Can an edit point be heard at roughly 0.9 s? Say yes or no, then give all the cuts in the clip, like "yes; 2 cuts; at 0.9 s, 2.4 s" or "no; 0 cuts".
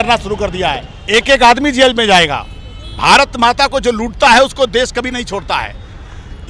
yes; 1 cut; at 0.9 s